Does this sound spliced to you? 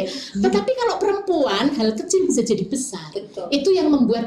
no; 0 cuts

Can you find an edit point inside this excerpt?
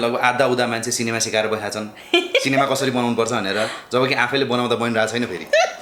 no; 0 cuts

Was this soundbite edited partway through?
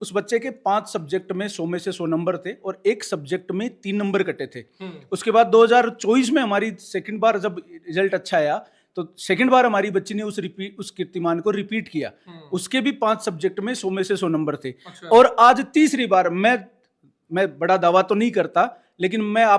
no; 0 cuts

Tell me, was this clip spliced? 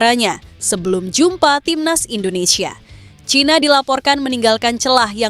no; 0 cuts

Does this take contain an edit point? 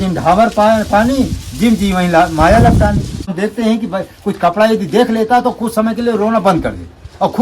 yes; 1 cut; at 3.3 s

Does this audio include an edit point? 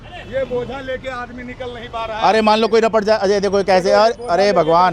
no; 0 cuts

